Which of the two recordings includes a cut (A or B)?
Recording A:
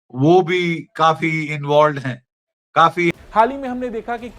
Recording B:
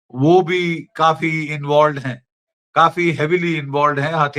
A